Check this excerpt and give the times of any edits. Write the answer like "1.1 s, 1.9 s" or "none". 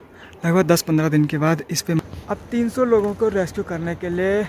2.0 s